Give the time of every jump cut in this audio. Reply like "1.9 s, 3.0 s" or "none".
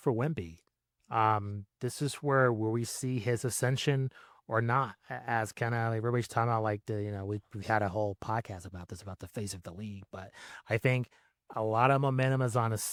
none